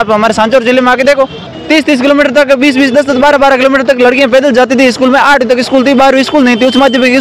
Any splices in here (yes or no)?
yes